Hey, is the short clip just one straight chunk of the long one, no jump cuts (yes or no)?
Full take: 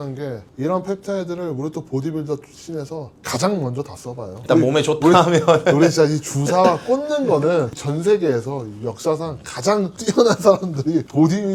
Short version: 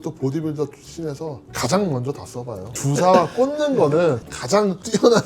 no